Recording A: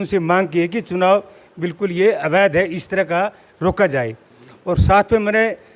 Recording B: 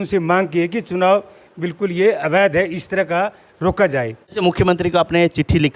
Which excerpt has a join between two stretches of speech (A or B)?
B